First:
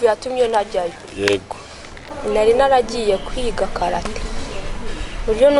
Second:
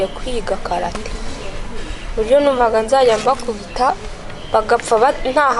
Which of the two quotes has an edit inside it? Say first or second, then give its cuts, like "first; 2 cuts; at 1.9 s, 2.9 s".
first; 1 cut; at 2.1 s